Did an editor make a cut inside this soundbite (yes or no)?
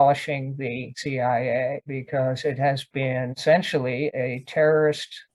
no